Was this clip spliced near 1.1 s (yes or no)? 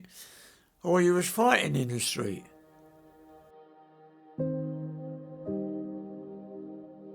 no